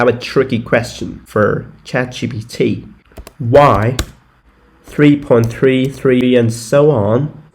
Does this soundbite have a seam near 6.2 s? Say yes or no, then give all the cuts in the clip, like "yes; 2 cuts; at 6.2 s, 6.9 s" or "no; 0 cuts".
yes; 2 cuts; at 1.1 s, 6.2 s